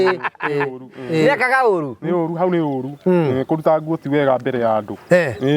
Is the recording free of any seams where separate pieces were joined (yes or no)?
yes